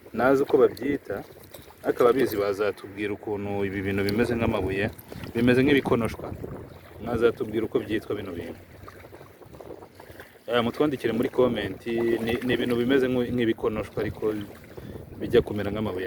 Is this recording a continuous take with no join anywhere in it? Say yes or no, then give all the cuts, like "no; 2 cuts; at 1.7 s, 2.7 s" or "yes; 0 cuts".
yes; 0 cuts